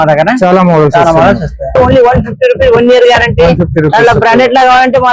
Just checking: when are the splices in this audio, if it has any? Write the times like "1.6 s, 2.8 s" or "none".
1.7 s